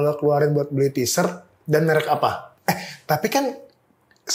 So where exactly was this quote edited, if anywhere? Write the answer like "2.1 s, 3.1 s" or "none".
2.5 s